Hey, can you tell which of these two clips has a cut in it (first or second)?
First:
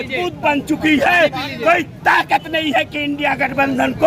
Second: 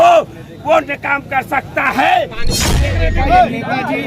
second